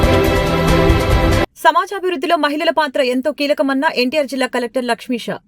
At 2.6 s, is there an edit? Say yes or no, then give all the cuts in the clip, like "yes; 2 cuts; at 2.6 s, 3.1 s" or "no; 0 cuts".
no; 1 cut; at 1.2 s